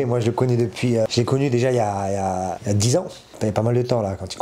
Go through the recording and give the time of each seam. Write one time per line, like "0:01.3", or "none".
0:01.1
0:02.6
0:03.3